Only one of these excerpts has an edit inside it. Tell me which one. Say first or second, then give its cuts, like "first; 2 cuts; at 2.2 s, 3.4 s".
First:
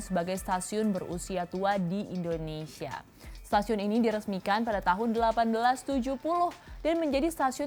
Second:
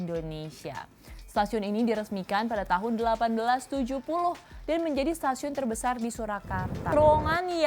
second; 1 cut; at 6.8 s